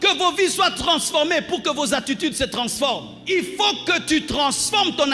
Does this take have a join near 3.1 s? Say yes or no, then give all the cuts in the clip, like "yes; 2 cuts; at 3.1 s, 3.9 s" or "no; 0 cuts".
yes; 1 cut; at 3.1 s